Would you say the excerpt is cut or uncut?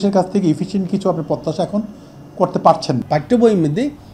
cut